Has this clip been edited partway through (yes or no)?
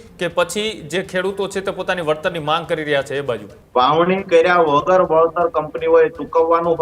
yes